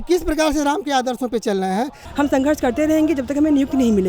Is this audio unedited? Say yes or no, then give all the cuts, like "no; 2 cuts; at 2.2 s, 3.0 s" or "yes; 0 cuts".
no; 1 cut; at 2.0 s